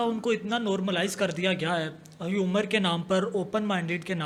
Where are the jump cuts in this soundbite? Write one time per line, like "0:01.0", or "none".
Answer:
none